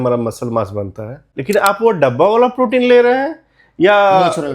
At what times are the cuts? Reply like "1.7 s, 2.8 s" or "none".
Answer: 1.2 s

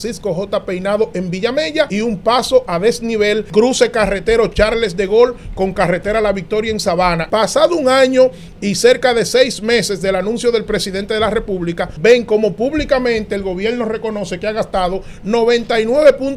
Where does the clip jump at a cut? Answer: 1.9 s, 3.5 s, 7.2 s, 11.9 s

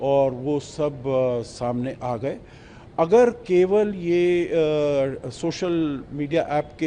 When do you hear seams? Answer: none

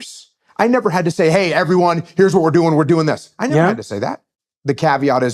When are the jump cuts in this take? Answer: 4.2 s

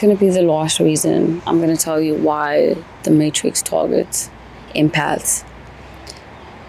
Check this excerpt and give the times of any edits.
1.4 s

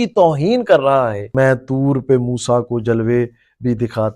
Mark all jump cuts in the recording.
1.2 s

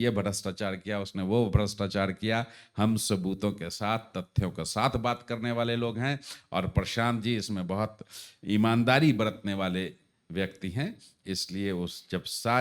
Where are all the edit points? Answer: none

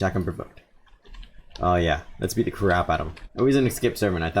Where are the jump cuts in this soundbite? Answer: 3.2 s

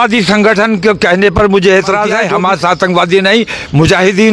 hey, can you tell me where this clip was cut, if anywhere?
2.4 s

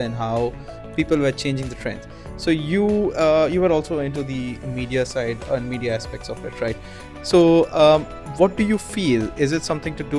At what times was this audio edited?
none

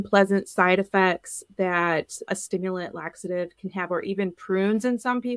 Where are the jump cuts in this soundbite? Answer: none

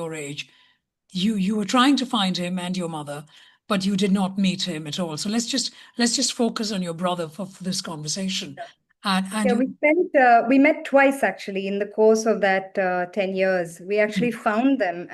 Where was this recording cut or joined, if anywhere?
none

